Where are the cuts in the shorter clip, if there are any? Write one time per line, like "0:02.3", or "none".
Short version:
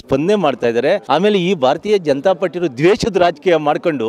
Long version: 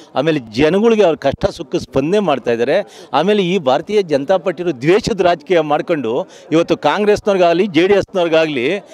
0:01.0